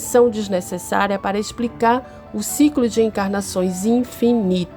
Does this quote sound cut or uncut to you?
uncut